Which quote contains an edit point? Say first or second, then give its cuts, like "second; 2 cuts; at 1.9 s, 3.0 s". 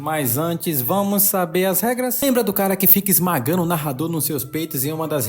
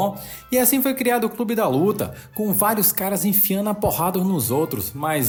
first; 1 cut; at 2.2 s